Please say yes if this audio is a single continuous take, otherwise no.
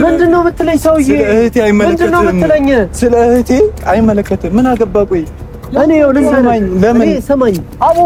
yes